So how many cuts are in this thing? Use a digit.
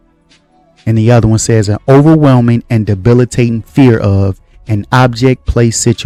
0